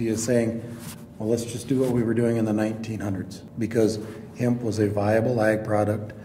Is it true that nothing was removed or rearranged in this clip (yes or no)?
no